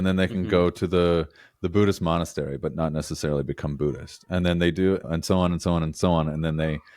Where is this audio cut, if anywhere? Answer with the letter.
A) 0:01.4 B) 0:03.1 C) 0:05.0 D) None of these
C